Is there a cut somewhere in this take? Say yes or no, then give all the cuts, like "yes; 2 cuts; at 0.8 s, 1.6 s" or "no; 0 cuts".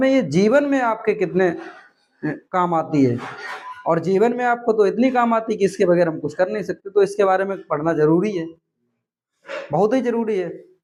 no; 0 cuts